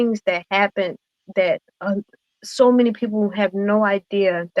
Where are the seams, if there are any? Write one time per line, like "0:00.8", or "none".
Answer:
none

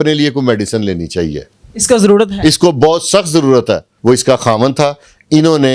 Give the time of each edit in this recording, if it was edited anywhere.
0:03.9

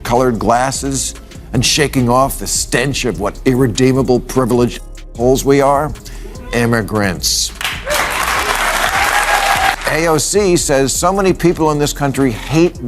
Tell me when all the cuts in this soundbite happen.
0:10.0

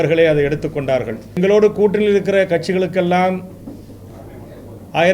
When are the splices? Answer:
0:01.3

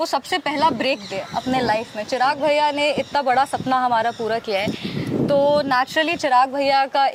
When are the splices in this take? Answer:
none

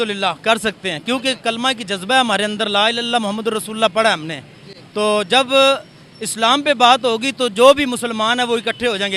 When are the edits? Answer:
none

